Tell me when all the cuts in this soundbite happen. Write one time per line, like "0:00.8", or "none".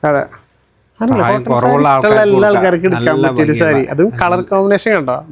none